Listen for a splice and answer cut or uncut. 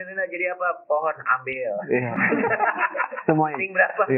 uncut